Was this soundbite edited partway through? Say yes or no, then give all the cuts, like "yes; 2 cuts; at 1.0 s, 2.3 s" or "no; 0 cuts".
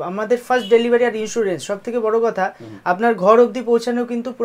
no; 0 cuts